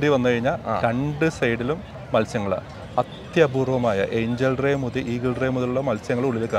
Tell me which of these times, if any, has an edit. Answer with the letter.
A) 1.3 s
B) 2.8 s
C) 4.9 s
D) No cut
B